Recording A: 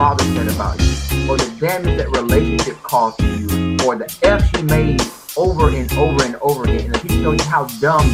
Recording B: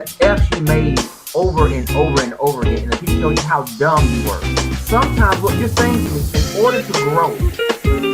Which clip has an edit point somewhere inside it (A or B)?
B